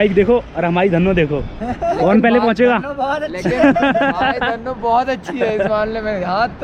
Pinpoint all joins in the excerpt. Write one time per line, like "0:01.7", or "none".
none